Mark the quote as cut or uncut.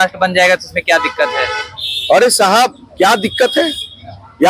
uncut